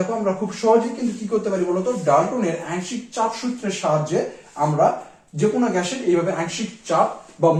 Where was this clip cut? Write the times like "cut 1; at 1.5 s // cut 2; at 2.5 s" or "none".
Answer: none